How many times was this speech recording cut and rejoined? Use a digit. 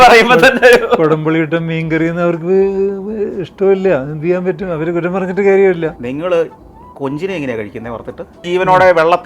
2